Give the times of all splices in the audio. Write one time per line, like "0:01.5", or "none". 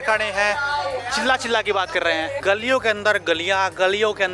0:01.0
0:02.4